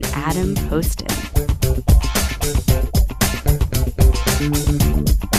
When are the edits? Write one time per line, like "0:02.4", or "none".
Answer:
0:04.1